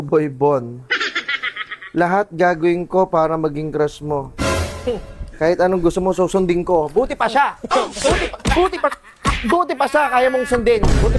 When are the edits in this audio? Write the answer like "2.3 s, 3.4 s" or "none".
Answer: none